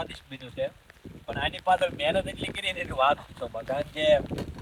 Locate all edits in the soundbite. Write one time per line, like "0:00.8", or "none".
none